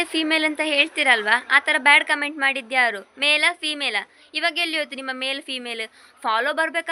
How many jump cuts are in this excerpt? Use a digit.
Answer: 0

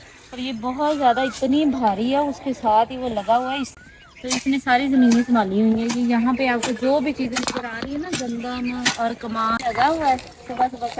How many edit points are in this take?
2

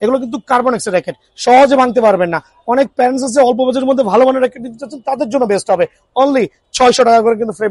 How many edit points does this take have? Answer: 0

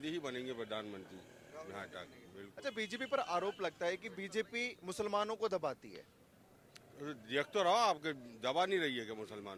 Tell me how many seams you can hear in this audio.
0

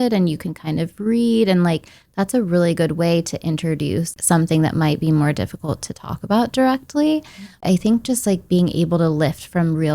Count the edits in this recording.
2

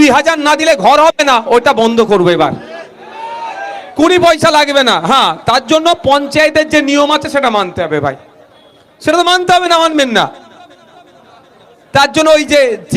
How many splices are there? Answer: 0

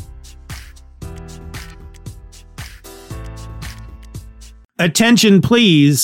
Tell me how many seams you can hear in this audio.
1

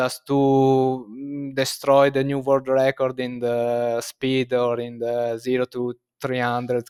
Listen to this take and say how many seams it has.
0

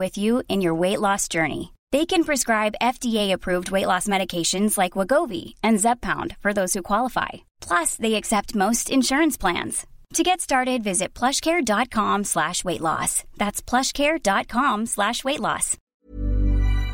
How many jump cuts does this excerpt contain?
1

